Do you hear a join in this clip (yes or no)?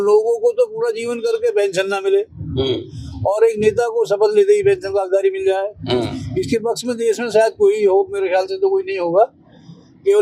no